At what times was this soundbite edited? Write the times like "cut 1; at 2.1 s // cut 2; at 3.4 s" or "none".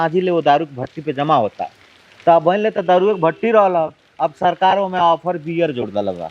none